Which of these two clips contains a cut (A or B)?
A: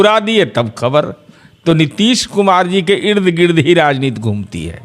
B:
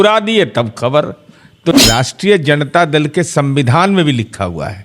B